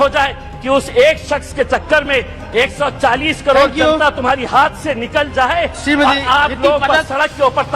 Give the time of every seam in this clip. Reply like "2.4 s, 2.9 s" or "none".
none